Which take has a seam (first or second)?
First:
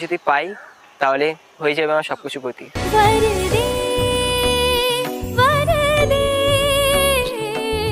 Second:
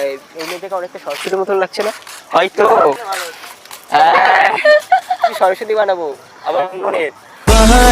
second